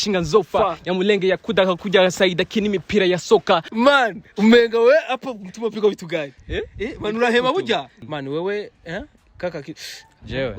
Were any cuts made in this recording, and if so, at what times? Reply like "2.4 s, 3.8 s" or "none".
3.7 s, 8.0 s